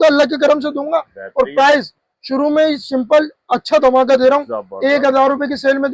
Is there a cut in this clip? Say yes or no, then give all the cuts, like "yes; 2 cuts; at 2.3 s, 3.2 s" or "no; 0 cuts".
no; 0 cuts